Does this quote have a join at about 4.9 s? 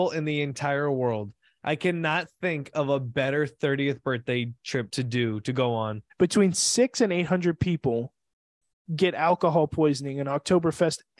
yes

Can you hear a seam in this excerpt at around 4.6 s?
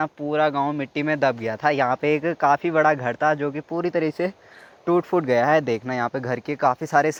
no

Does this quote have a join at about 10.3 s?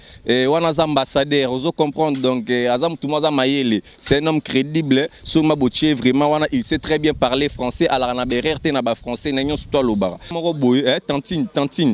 yes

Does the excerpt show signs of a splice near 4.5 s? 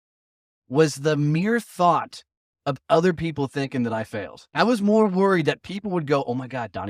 yes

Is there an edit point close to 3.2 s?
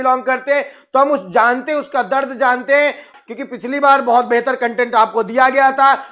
yes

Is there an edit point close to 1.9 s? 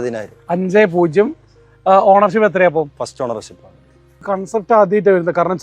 no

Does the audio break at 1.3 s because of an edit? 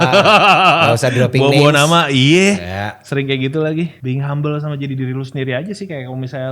no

